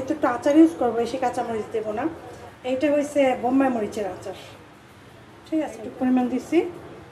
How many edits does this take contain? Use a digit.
1